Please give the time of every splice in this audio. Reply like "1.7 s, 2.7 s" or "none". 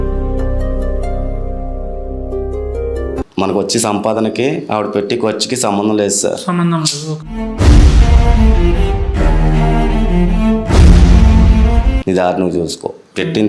3.2 s, 11.9 s